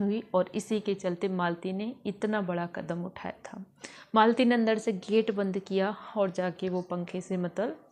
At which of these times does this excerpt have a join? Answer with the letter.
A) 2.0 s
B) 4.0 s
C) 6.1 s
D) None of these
D